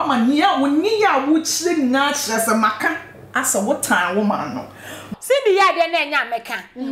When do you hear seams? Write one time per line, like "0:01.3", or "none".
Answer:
0:05.1